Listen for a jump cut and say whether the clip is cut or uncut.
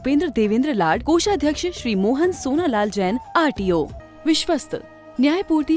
cut